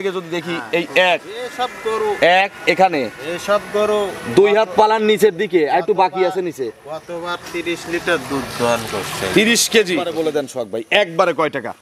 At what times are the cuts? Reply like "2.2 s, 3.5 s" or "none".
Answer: 10.1 s